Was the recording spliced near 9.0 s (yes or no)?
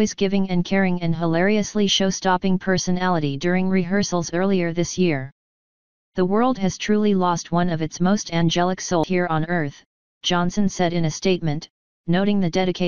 yes